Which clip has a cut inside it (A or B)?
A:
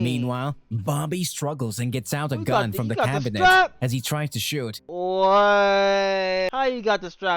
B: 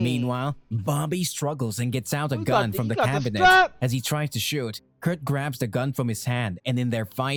A